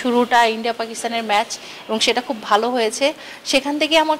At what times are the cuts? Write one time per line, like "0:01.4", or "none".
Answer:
none